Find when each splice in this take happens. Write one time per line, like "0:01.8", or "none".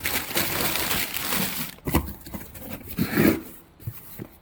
none